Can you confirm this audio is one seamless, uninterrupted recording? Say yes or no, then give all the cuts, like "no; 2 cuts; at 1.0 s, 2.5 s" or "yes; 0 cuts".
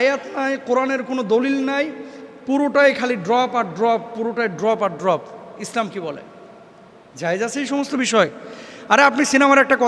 yes; 0 cuts